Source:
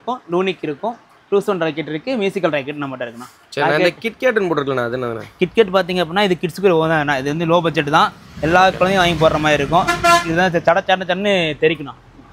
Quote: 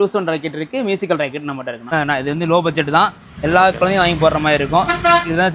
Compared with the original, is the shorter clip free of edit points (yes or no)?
no